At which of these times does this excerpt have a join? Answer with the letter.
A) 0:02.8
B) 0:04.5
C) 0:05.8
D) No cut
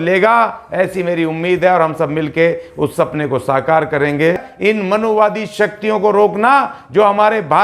B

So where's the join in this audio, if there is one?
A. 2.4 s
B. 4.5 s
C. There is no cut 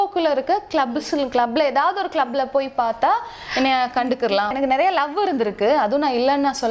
B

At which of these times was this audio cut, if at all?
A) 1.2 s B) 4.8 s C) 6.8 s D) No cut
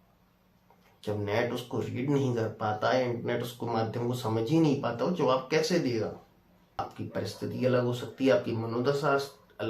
C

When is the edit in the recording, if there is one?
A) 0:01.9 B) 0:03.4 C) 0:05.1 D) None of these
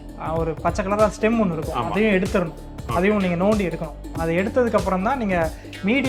D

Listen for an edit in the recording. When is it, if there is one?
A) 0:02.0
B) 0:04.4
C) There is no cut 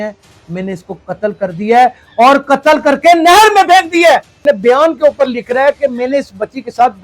B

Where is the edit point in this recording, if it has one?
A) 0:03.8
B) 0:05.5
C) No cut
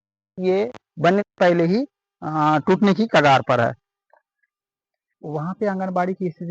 C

